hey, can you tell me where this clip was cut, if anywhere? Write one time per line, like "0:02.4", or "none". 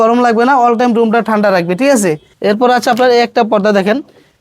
0:02.3